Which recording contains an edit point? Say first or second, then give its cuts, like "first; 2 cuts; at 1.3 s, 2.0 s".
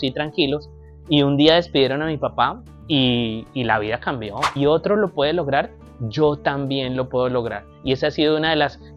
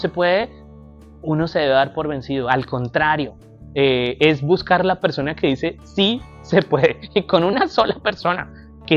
first; 1 cut; at 4.4 s